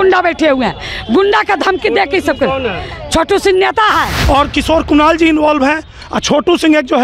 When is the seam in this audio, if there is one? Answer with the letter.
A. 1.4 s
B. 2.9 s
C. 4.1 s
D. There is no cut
C